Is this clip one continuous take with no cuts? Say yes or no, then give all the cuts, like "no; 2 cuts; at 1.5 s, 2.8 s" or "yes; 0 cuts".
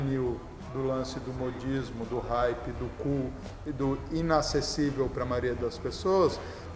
yes; 0 cuts